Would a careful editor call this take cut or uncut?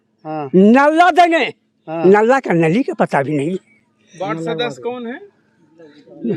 uncut